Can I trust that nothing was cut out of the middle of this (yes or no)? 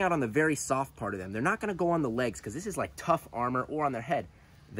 yes